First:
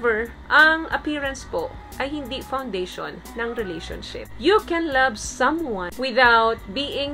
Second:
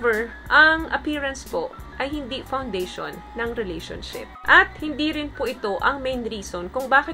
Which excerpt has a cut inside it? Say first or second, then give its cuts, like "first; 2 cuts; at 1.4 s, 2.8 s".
first; 2 cuts; at 4.3 s, 5.9 s